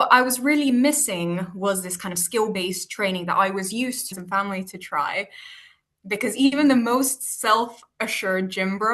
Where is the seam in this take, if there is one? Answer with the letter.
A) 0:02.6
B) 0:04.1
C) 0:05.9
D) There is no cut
B